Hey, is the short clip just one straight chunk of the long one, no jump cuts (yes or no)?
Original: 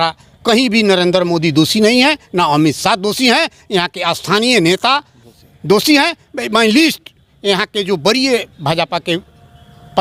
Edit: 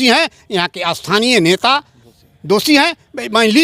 yes